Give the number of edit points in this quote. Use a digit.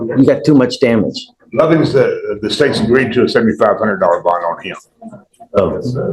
0